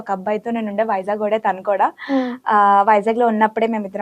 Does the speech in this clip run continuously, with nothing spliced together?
yes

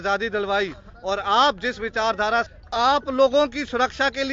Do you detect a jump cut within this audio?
yes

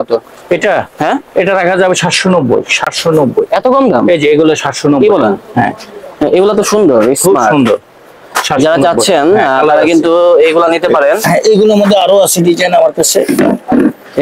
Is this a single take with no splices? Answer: yes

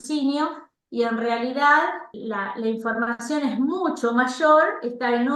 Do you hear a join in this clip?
yes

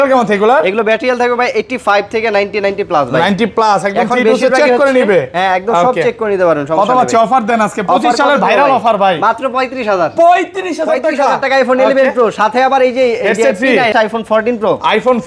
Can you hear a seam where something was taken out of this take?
yes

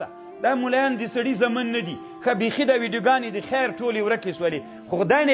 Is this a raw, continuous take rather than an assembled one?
yes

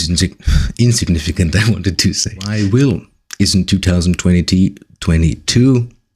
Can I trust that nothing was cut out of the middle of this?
no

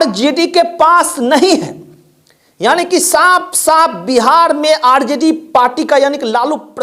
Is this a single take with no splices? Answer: yes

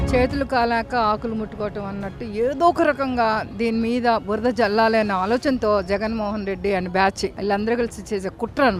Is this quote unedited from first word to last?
yes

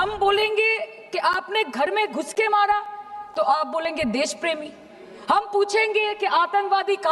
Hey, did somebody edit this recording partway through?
no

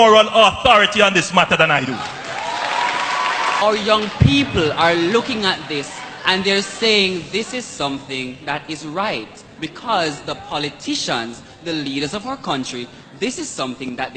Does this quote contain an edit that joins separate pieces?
yes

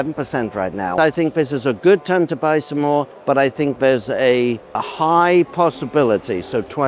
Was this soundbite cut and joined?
yes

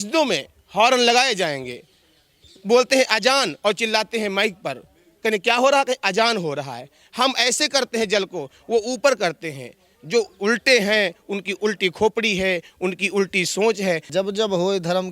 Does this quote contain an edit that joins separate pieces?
yes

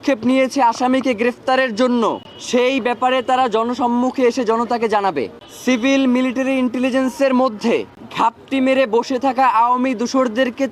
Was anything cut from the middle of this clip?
yes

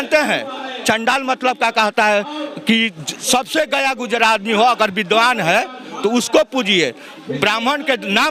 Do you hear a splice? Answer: no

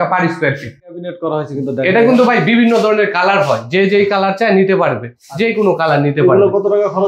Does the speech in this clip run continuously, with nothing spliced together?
no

